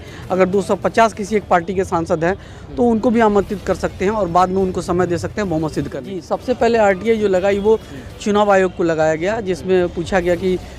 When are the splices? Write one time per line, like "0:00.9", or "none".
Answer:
0:05.9